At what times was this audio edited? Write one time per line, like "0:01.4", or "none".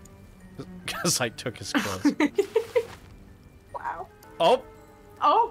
0:04.2